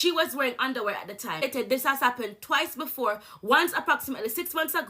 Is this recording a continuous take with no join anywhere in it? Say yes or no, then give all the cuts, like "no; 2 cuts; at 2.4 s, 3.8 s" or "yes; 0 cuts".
no; 1 cut; at 1.5 s